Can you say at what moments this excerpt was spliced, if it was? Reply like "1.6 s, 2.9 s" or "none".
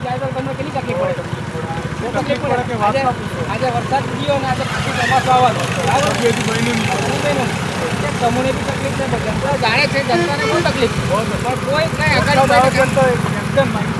none